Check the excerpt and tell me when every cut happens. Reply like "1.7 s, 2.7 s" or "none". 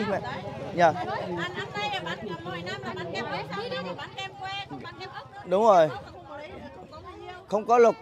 none